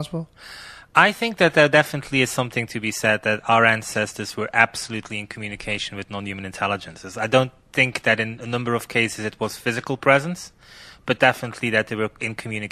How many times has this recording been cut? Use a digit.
0